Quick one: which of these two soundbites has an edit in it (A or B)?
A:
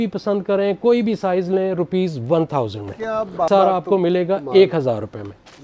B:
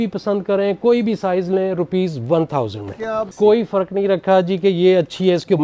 B